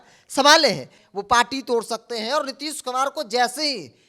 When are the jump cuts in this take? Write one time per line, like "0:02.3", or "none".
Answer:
0:00.9